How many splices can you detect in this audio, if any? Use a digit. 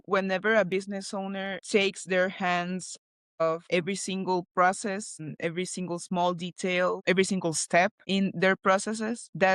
0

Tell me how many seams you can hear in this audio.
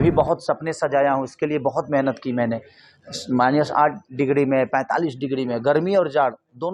0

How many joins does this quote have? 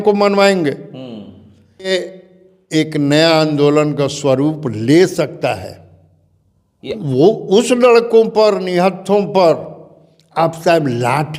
2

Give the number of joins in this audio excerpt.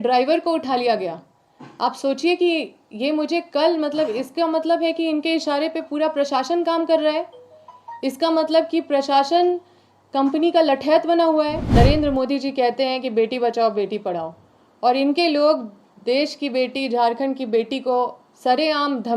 1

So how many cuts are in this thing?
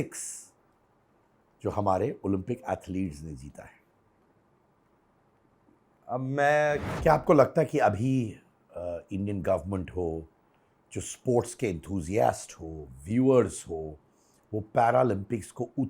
1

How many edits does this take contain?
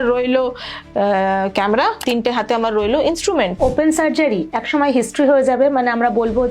2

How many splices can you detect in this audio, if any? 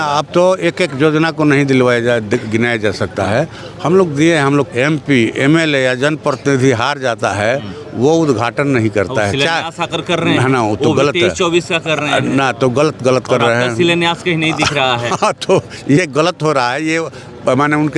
1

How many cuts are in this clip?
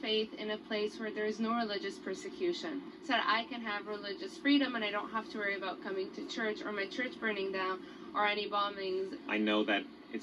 1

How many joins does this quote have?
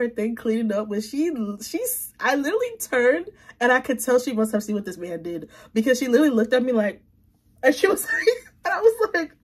0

